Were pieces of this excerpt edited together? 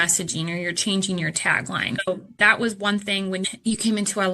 yes; 2 cuts; at 2.0 s, 3.4 s

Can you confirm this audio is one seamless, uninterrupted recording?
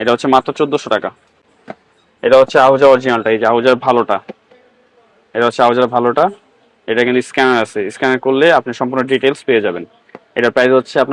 yes; 0 cuts

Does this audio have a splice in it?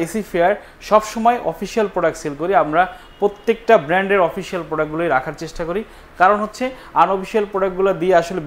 no; 0 cuts

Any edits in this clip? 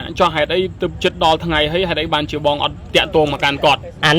no; 0 cuts

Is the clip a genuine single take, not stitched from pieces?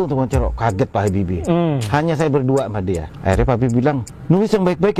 no; 2 cuts; at 3.1 s, 4.1 s

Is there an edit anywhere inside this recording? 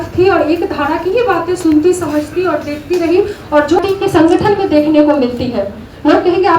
yes; 1 cut; at 3.8 s

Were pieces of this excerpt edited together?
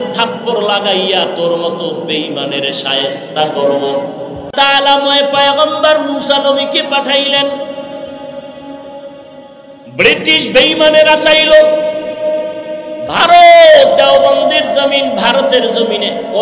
yes; 1 cut; at 4.4 s

